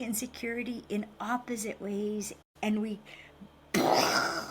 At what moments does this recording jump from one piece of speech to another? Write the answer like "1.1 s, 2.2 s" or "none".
2.3 s